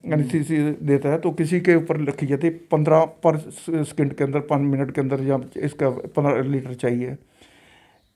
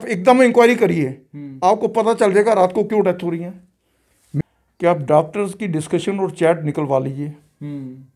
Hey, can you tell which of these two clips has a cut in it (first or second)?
second